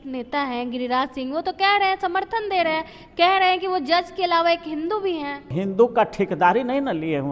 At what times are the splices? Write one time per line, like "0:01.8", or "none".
0:05.5